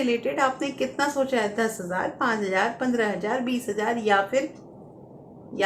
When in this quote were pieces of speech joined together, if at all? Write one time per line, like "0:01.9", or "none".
none